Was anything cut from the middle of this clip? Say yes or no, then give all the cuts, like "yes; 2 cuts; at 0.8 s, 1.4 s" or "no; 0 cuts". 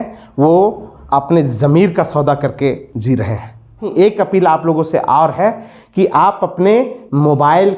yes; 1 cut; at 3.8 s